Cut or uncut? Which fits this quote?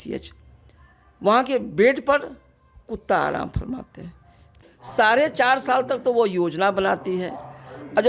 cut